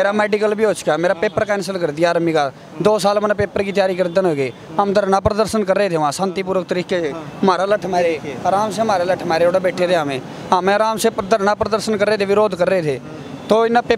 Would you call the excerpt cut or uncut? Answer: uncut